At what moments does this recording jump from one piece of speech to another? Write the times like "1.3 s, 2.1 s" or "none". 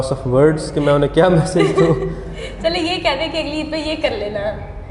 none